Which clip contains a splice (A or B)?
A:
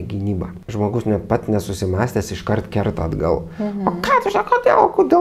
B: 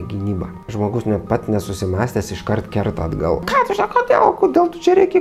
B